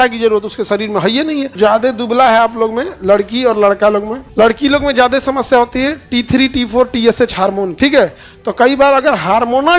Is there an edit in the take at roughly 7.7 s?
yes; 3 cuts; at 1.5 s, 4.2 s, 7.7 s

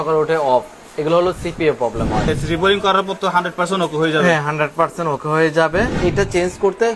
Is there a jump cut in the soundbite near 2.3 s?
yes; 2 cuts; at 2.3 s, 5.9 s

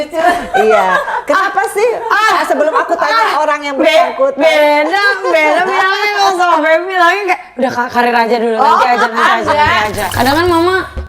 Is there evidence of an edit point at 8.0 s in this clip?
no; 1 cut; at 10.0 s

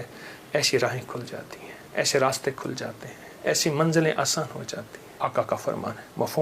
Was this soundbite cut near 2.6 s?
no; 1 cut; at 5.0 s

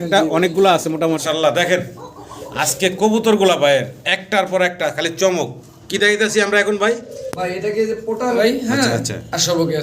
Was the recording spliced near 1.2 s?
yes; 2 cuts; at 1.2 s, 8.4 s

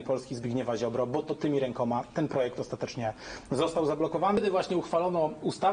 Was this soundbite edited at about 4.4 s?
yes; 1 cut; at 4.4 s

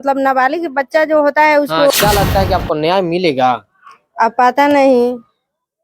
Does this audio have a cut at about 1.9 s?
yes; 1 cut; at 1.9 s

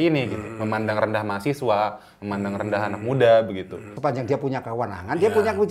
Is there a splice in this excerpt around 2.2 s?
no; 1 cut; at 3.9 s

